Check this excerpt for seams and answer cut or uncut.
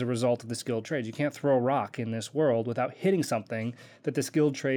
uncut